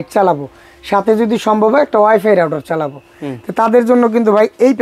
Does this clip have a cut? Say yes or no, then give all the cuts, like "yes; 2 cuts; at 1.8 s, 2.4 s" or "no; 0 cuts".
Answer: no; 0 cuts